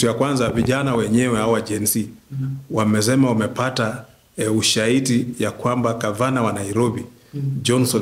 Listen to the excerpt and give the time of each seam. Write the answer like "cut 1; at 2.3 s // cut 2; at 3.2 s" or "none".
none